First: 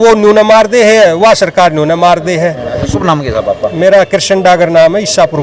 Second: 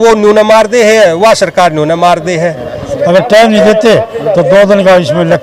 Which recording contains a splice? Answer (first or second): second